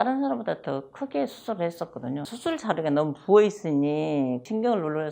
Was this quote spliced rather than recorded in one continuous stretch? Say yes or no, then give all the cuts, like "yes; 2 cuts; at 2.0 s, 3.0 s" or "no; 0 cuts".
no; 0 cuts